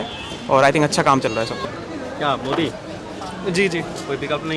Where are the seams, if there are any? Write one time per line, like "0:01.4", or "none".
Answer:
0:01.6